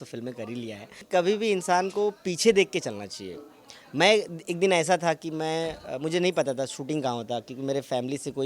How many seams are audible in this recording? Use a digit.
1